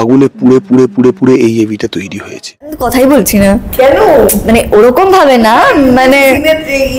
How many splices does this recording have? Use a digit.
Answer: 1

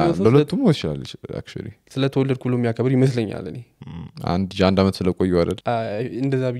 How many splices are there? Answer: 1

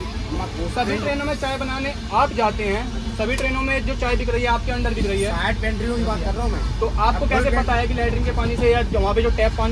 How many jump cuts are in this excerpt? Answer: 0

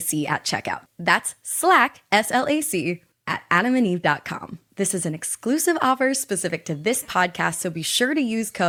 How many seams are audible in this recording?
0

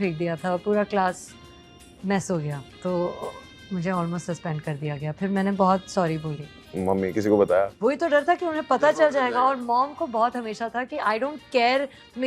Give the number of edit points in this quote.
0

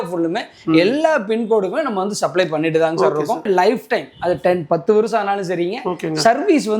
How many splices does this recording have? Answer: 1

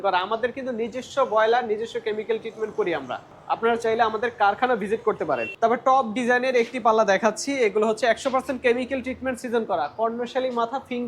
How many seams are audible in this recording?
2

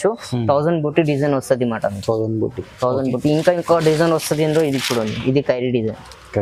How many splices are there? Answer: 0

